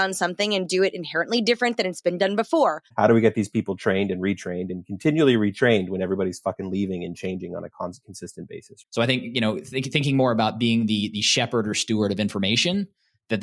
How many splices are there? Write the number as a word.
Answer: two